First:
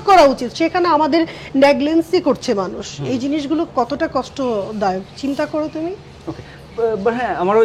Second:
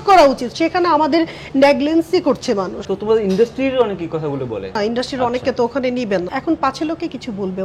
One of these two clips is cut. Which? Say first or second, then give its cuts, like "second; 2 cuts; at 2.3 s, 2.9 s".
second; 3 cuts; at 2.8 s, 4.7 s, 6.3 s